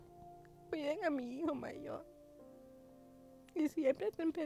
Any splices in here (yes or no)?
yes